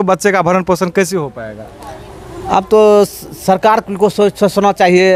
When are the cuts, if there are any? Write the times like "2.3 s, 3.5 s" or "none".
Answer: none